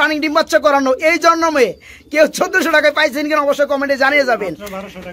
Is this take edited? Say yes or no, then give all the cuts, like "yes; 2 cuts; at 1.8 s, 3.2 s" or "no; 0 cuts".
no; 0 cuts